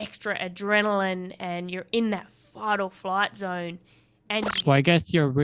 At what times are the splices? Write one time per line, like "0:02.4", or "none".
0:04.5